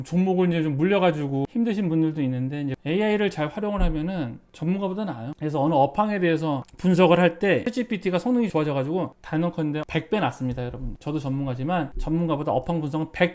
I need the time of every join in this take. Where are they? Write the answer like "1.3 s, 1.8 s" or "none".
2.8 s, 9.8 s